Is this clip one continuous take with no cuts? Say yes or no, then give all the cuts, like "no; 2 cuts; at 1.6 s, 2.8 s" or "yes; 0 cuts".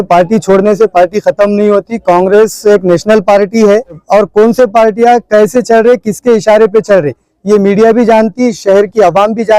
no; 1 cut; at 4.0 s